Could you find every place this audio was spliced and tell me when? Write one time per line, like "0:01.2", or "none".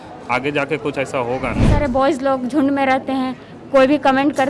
0:01.7